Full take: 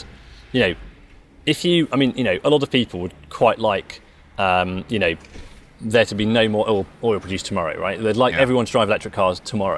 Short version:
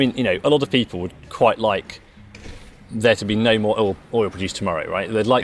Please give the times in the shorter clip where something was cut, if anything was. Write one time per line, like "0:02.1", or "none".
0:02.3